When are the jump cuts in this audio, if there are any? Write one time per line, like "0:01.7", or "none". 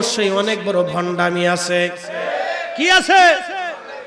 0:02.2